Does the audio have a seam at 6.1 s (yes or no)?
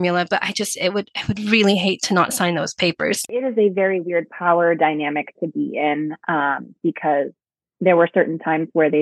no